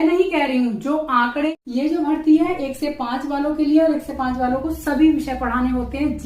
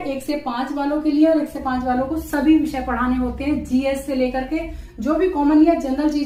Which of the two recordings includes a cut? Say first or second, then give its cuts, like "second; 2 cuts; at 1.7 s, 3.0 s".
first; 1 cut; at 1.5 s